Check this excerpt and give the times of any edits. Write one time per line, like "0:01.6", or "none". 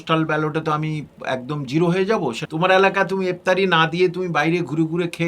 0:02.4